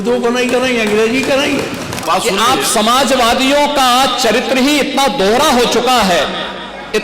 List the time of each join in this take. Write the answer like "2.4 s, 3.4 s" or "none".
2.0 s